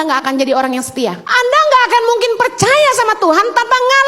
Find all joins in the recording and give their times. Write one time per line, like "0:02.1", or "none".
0:01.2

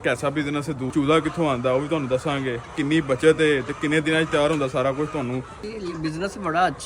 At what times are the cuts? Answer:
0:00.9
0:02.7
0:05.7

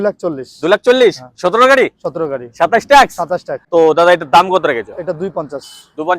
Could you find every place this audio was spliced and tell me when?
0:03.5

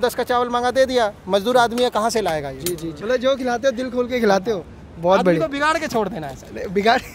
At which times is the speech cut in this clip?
0:02.9

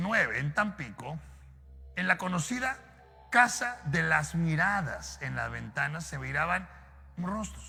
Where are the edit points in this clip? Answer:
none

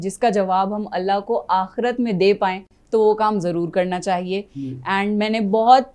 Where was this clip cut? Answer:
none

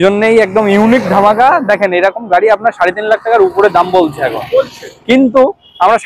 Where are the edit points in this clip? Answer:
none

